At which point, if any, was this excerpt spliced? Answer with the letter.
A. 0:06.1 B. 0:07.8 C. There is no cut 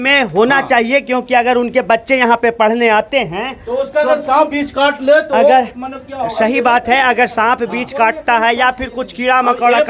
C